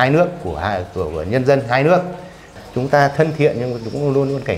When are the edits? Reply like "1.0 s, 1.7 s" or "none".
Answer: 2.5 s

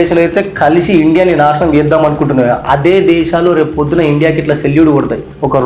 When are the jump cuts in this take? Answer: none

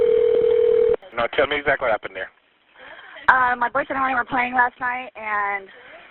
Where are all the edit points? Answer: 1.1 s

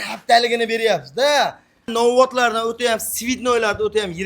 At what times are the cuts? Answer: 1.9 s

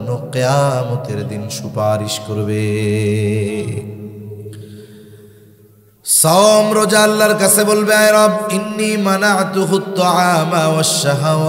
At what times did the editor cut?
5.3 s

